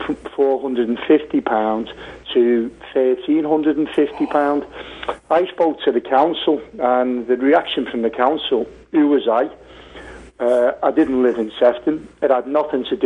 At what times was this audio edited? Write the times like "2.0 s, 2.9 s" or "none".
4.8 s